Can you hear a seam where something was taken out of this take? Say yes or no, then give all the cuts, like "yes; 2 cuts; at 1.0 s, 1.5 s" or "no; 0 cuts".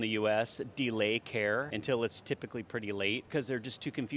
yes; 2 cuts; at 1.7 s, 3.2 s